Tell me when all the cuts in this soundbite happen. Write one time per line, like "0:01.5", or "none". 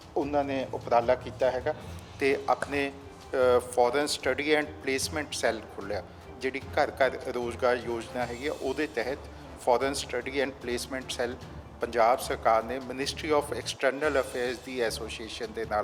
none